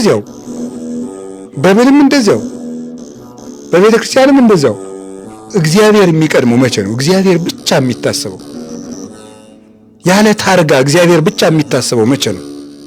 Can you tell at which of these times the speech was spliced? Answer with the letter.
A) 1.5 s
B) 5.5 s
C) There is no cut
B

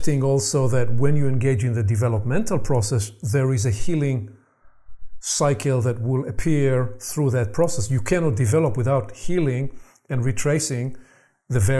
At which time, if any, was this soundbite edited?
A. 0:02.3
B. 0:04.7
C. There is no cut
C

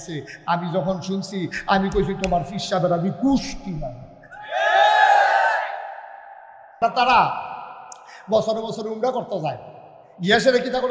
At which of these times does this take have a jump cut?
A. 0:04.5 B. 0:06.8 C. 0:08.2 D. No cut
B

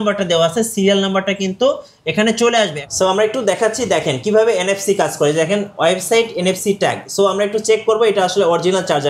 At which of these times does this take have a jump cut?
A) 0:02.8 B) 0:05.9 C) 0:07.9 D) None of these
A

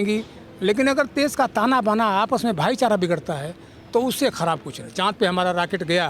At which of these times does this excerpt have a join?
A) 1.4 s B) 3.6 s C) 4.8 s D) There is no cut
C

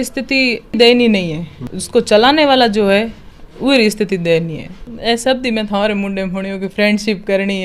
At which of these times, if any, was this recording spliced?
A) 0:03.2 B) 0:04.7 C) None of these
B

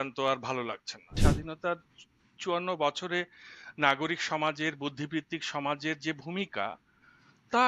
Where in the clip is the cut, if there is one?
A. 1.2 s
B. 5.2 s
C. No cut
A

